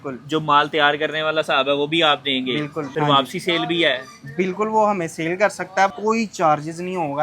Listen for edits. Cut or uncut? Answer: cut